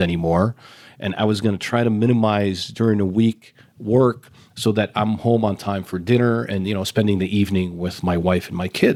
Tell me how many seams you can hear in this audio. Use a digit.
0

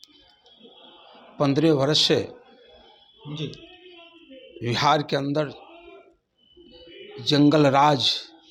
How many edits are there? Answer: 0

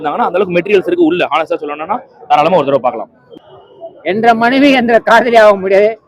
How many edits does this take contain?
1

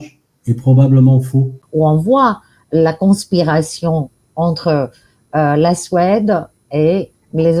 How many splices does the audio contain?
1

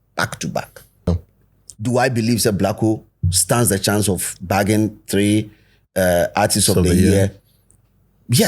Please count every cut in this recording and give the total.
1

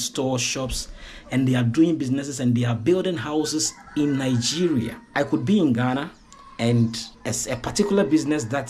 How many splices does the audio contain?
1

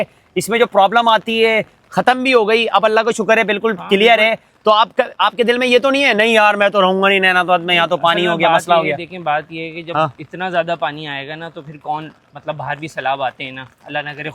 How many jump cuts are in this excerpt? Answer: 0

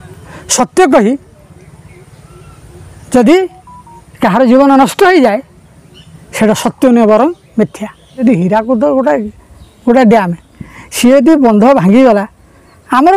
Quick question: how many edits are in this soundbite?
1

